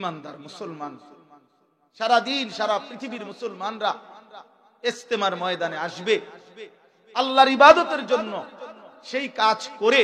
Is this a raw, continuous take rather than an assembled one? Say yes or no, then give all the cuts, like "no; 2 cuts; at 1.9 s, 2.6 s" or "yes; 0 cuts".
yes; 0 cuts